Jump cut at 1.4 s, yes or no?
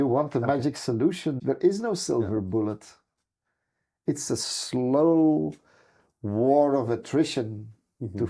yes